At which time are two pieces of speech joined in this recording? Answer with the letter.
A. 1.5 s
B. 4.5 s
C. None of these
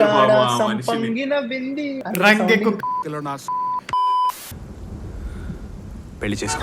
B